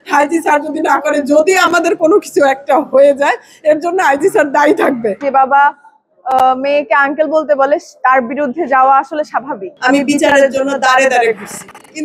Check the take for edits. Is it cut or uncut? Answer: cut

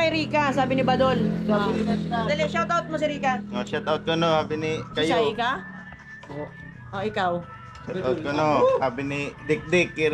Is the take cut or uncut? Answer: uncut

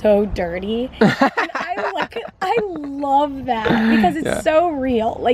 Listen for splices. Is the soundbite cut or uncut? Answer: uncut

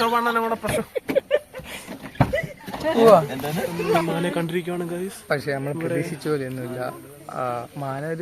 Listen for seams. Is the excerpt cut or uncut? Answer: cut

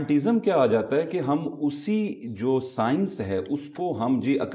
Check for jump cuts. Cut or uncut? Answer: uncut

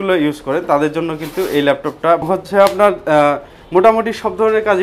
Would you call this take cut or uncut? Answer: cut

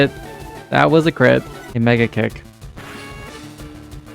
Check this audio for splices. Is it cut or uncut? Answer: cut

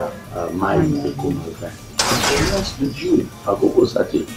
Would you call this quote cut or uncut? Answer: cut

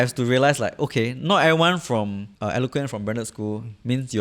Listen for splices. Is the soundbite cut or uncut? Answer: cut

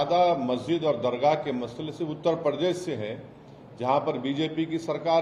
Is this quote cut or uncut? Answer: uncut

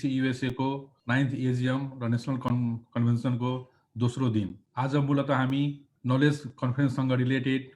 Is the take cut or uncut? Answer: cut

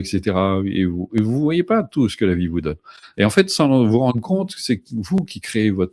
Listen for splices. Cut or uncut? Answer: uncut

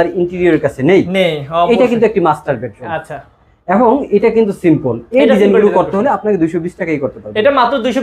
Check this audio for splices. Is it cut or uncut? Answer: uncut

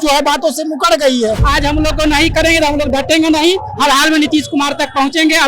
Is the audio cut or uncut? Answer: cut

